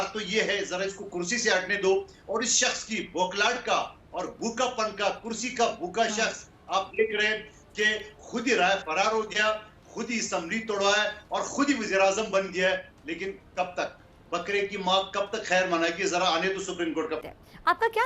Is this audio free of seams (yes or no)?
no